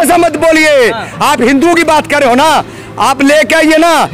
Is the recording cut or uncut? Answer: uncut